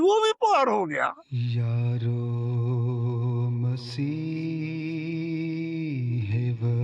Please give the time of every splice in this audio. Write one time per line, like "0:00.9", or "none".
0:01.2